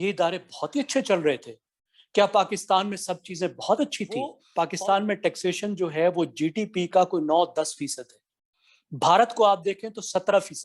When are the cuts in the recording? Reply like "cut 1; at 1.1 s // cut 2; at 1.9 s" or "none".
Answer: cut 1; at 4.4 s